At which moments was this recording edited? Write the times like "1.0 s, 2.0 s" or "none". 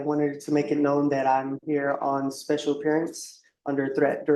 none

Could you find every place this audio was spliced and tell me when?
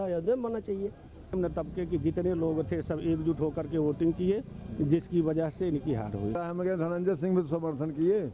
1.3 s, 6.4 s

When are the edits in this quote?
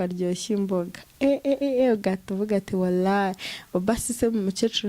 none

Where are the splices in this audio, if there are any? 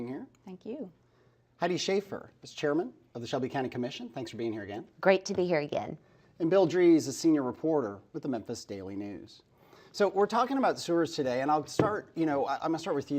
10.8 s

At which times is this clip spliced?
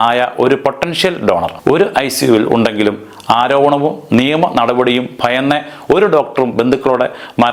none

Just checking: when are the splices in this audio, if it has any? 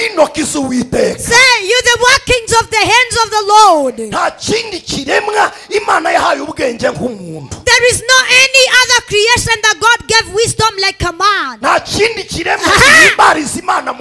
none

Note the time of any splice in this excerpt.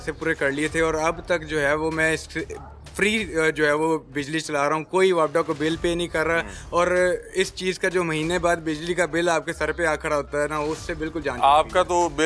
none

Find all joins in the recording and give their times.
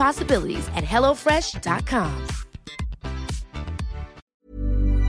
4.2 s

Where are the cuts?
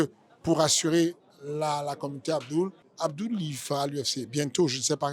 2.8 s

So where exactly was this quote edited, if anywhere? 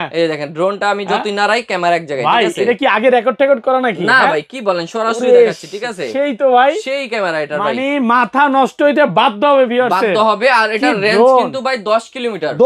none

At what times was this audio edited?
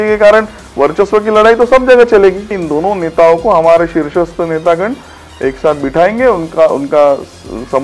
2.6 s

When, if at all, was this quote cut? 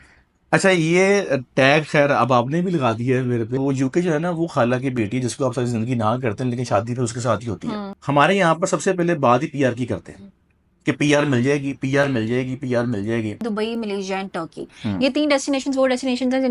3.6 s, 7.9 s, 13.4 s

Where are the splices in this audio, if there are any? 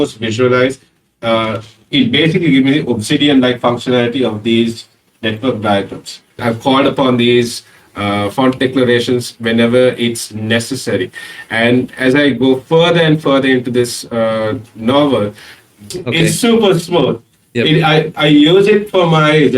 6.4 s, 15.9 s

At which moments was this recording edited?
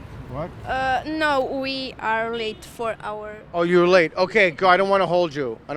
none

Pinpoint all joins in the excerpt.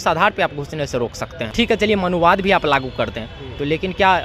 1.5 s

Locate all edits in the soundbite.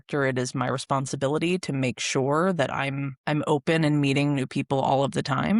3.1 s

